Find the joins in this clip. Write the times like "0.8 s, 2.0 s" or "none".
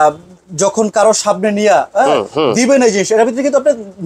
none